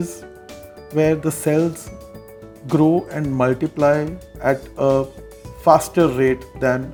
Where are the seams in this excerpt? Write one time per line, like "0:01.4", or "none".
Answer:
none